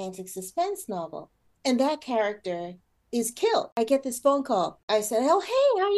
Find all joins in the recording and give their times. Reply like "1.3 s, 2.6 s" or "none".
3.7 s, 4.8 s